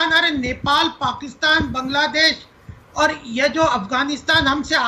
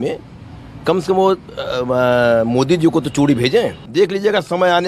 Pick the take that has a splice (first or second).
second